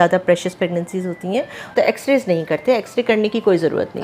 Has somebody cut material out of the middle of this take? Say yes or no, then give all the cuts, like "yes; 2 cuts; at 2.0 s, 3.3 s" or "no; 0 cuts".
yes; 1 cut; at 1.7 s